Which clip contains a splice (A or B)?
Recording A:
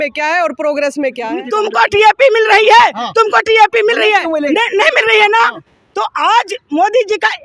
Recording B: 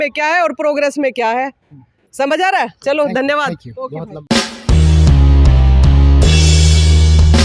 A